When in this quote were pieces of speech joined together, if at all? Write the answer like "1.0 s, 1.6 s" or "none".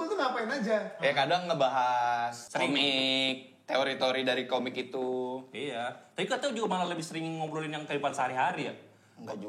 2.4 s